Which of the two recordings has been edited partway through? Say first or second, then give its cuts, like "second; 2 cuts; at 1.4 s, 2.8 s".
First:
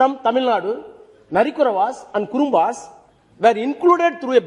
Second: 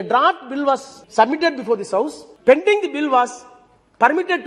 second; 2 cuts; at 1.0 s, 2.2 s